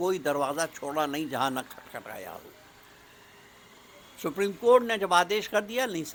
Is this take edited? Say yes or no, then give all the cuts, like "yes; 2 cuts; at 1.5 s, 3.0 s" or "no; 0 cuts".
no; 0 cuts